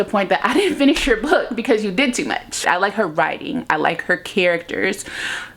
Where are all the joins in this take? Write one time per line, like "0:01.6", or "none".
0:02.6

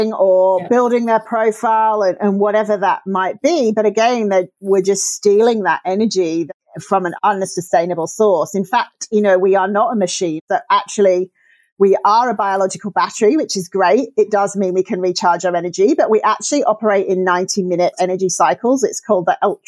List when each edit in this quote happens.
0:10.4
0:17.9

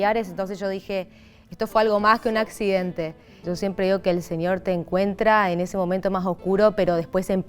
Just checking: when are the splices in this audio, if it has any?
0:03.4

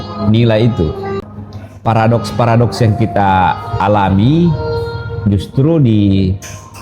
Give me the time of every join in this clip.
0:01.2

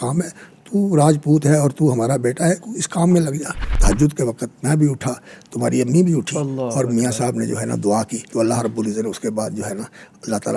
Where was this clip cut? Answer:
0:03.7
0:08.3

